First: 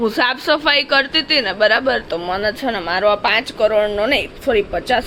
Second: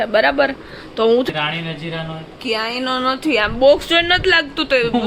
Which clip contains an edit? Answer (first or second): second